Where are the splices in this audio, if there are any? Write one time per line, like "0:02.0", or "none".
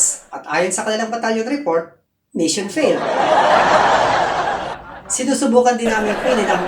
0:04.6